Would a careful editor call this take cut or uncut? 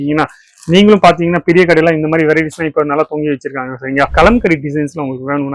cut